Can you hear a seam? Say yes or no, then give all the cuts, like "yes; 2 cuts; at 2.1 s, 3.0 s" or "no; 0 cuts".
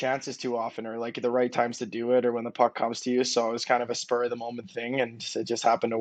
no; 0 cuts